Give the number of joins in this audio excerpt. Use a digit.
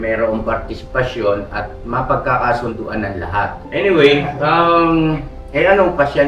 1